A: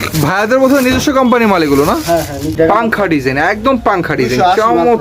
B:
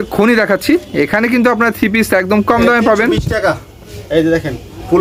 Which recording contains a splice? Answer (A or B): A